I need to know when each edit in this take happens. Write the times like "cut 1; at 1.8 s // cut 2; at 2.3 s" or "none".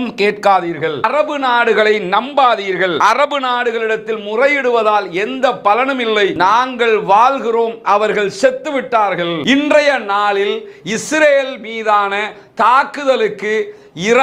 cut 1; at 1.1 s // cut 2; at 3.0 s // cut 3; at 6.3 s // cut 4; at 9.4 s

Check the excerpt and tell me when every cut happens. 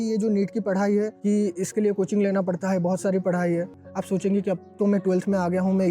cut 1; at 3.7 s

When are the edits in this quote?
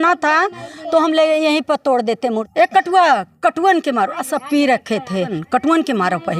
cut 1; at 2.5 s // cut 2; at 5.4 s

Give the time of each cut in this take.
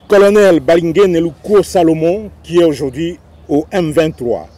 cut 1; at 3.3 s

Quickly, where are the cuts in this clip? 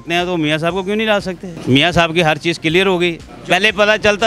cut 1; at 1.5 s // cut 2; at 3.3 s

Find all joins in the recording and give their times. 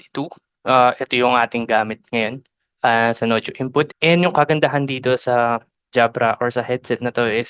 cut 1; at 3.9 s

